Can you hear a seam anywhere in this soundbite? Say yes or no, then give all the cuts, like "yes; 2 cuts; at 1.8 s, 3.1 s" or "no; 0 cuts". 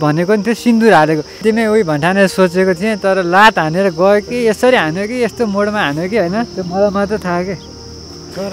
yes; 1 cut; at 1.4 s